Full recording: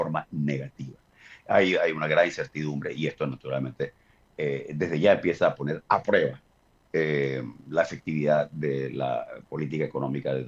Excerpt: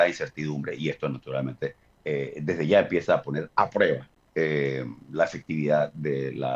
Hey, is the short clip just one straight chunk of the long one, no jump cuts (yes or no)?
no